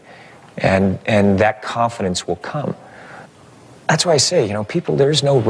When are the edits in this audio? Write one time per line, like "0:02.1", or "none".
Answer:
none